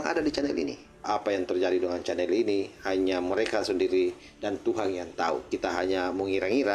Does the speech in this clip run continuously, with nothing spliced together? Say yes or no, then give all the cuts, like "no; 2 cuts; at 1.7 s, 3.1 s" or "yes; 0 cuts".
no; 1 cut; at 1.0 s